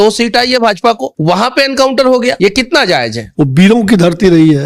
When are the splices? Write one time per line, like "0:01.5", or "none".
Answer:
0:01.1
0:02.4
0:03.2

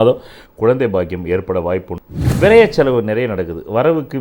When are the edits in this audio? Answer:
0:02.0

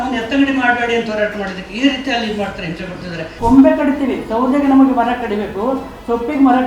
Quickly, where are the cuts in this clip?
0:03.3

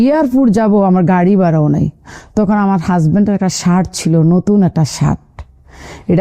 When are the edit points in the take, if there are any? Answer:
none

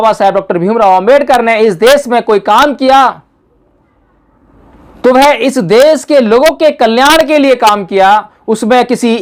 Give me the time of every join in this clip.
none

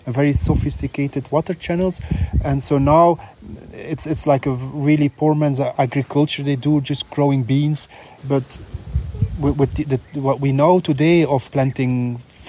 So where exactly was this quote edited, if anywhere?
0:05.7
0:08.1

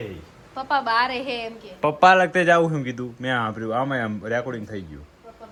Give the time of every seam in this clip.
none

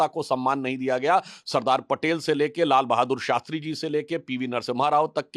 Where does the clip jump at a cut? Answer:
none

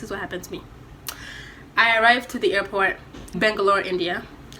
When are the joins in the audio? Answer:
0:03.4

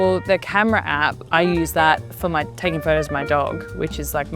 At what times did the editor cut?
0:01.2

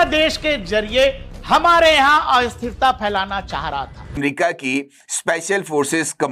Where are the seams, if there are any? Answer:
0:04.2

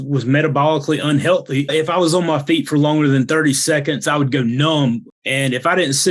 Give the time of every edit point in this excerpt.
0:01.7
0:05.1

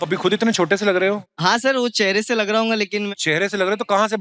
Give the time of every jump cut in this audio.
0:01.2
0:03.1

